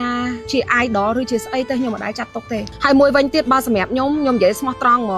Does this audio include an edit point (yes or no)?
no